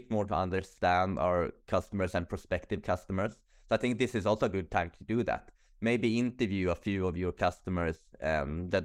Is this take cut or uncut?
uncut